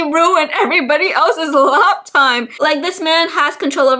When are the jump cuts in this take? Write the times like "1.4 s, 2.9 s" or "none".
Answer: 2.5 s